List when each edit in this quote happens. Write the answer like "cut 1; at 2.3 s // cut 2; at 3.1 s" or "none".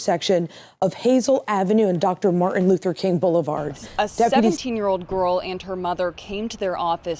cut 1; at 4.6 s

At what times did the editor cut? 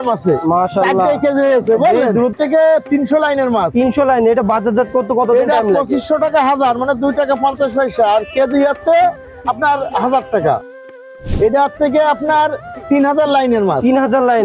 cut 1; at 2.3 s // cut 2; at 11.0 s

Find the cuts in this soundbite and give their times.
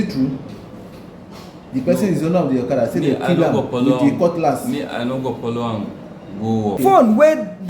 cut 1; at 6.8 s

